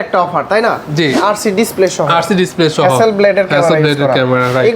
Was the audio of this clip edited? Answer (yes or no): yes